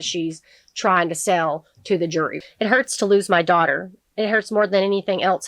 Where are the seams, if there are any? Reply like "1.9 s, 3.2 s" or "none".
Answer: 2.4 s